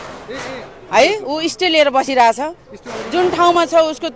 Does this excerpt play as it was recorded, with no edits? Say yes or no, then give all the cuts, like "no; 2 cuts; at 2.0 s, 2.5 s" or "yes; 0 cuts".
yes; 0 cuts